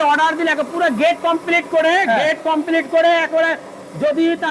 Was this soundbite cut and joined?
no; 0 cuts

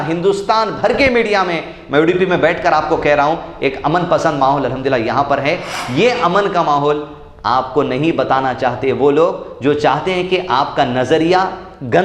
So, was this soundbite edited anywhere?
no; 0 cuts

